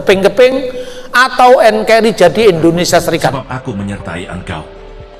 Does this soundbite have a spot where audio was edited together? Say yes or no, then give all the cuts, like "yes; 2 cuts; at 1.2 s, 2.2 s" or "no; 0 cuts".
yes; 1 cut; at 3.4 s